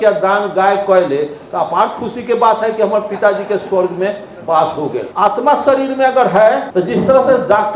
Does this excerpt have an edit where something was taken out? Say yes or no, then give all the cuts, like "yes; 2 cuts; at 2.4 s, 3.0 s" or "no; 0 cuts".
yes; 2 cuts; at 5.1 s, 6.7 s